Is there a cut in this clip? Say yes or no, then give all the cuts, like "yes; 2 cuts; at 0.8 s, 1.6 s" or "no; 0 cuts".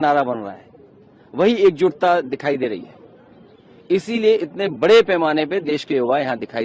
no; 0 cuts